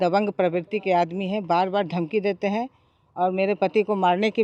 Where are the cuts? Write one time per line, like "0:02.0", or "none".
none

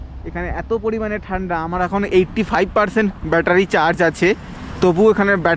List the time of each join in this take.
none

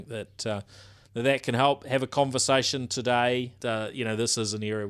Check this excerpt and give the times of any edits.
0:03.6

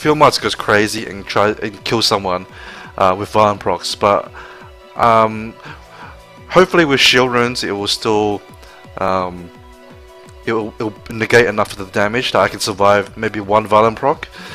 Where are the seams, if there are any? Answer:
0:06.4

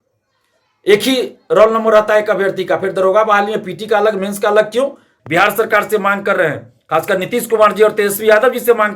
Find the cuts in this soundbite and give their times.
0:05.1

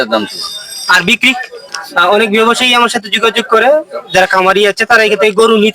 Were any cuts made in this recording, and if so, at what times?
0:01.6

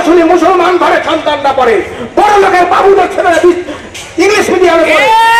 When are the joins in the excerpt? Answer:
none

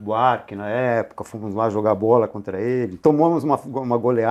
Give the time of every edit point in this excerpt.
none

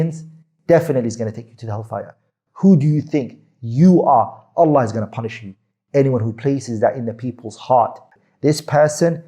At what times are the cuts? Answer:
0:08.1

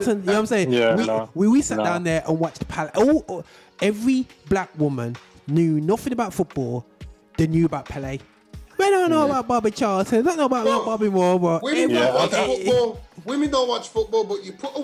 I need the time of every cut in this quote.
none

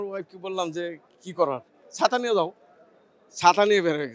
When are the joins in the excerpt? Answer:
none

